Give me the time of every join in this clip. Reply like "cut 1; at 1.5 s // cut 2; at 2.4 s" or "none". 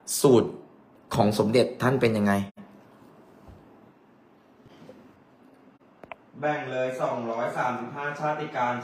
cut 1; at 4.9 s